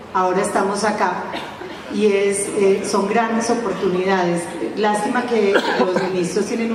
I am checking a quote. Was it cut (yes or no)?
no